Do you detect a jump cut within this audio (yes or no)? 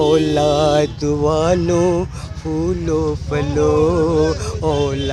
no